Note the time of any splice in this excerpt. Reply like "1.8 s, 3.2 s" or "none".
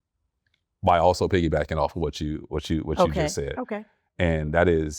none

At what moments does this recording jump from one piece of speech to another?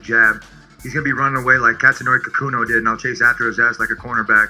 none

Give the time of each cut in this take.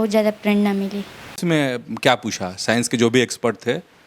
1.4 s

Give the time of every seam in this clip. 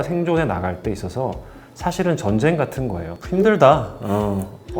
3.2 s

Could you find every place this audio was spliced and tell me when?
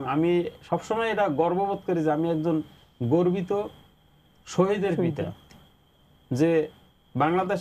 none

